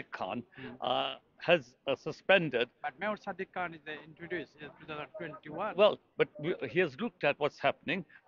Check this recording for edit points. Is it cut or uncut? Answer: uncut